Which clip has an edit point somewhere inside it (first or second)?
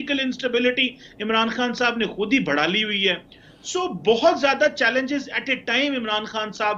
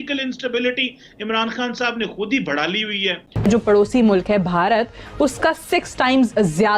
second